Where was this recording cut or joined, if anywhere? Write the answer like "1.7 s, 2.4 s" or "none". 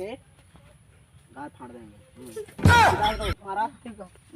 3.4 s